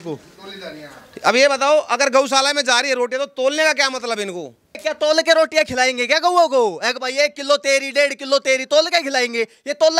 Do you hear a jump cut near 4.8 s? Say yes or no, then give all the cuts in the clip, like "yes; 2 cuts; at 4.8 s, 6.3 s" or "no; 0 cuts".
yes; 1 cut; at 4.8 s